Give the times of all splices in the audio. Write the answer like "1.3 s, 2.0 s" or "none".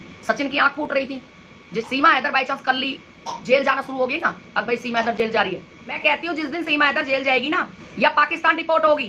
1.9 s, 6.0 s